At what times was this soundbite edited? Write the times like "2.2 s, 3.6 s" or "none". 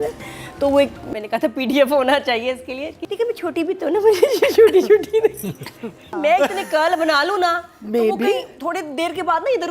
3.0 s, 6.1 s